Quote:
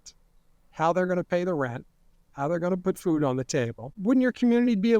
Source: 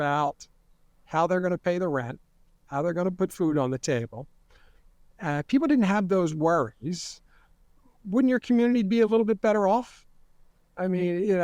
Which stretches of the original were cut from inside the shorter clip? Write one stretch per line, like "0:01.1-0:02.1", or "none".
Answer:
0:04.2-0:07.9